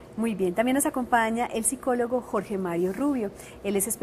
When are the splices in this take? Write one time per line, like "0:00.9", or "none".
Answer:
none